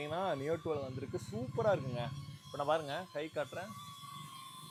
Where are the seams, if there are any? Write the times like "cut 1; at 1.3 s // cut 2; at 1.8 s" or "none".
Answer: none

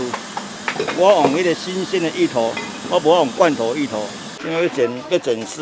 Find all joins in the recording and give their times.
cut 1; at 4.3 s

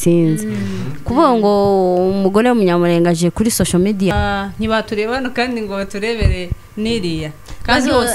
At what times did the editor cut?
cut 1; at 4.1 s

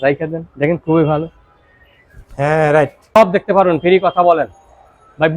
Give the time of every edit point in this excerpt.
cut 1; at 3.0 s

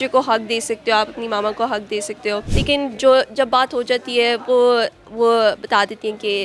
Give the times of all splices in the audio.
cut 1; at 2.5 s

